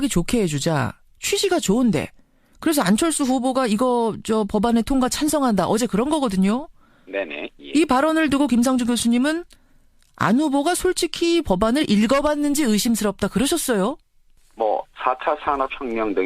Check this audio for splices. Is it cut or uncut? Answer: cut